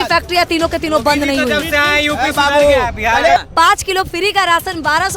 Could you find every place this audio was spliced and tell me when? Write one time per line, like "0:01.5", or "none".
0:03.4

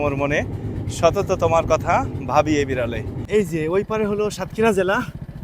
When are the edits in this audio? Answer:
0:03.2

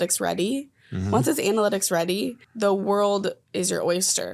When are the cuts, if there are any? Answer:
0:02.4
0:03.4

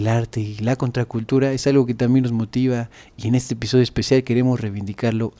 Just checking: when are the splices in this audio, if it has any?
none

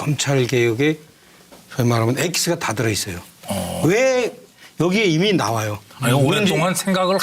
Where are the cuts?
0:01.0

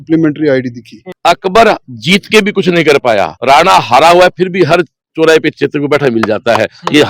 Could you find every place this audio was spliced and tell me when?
0:01.1

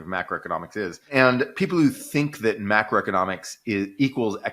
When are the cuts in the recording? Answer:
0:01.1

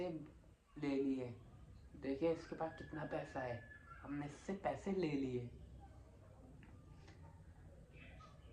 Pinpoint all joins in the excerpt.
none

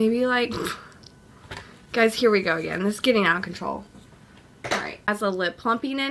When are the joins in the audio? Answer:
0:05.1

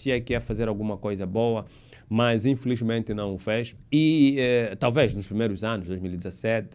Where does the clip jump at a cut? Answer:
0:03.8

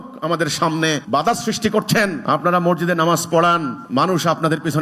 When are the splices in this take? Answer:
0:01.0
0:02.2
0:03.8

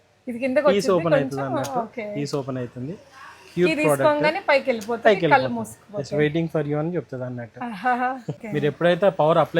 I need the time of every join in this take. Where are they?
0:08.4

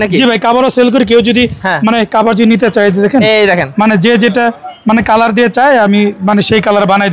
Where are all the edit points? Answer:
none

